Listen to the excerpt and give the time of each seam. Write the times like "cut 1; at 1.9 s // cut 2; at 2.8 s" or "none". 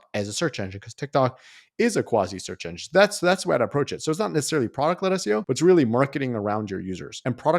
none